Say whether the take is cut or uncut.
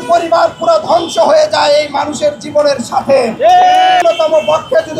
cut